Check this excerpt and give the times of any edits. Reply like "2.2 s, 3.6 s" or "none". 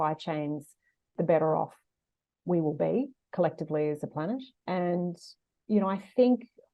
1.1 s, 4.5 s